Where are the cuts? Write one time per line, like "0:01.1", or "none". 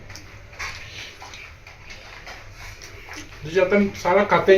none